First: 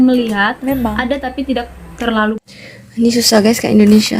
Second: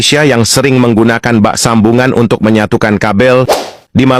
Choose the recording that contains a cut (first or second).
first